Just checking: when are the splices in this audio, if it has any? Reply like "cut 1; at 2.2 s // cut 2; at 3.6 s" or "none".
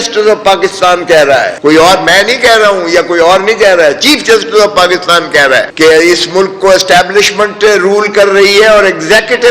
cut 1; at 1.5 s // cut 2; at 5.7 s